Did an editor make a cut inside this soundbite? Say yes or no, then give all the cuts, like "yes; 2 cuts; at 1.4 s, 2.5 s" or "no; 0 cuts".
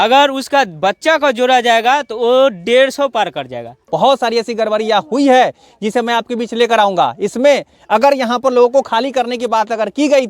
yes; 1 cut; at 3.8 s